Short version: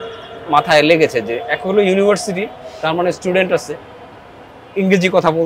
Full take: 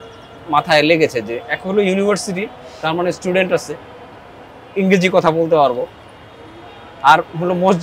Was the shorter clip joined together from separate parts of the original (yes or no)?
no